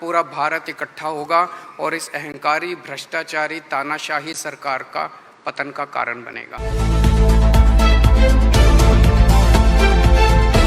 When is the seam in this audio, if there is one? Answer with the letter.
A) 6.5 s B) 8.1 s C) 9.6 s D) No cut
A